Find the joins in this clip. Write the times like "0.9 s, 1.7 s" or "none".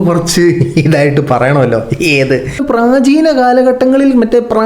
2.6 s

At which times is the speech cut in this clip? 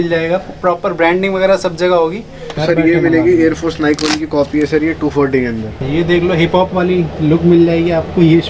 2.5 s, 5.8 s

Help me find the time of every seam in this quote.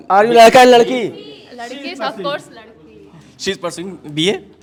none

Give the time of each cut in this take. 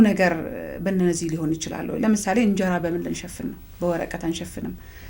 none

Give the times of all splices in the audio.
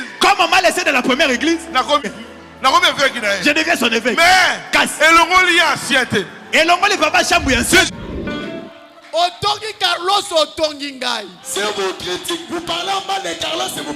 2.1 s, 7.9 s

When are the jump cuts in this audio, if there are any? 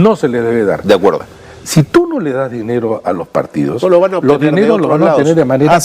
1.2 s

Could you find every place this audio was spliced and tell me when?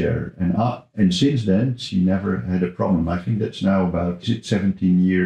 4.2 s

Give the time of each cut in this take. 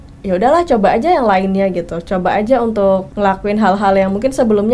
3.1 s

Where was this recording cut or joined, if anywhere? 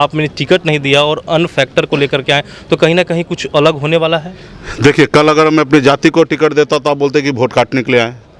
none

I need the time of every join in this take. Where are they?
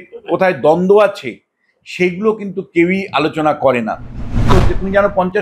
4.4 s

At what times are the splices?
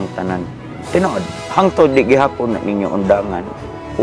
1.4 s

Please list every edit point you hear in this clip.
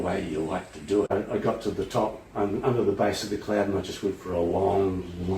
1.1 s

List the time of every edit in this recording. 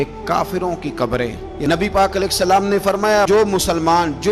1.5 s

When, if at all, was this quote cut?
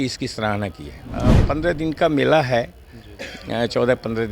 1.4 s

